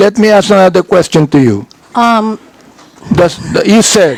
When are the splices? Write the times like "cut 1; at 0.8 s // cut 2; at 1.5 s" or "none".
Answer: none